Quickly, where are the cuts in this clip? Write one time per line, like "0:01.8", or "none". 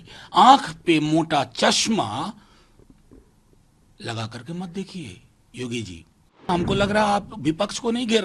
0:06.5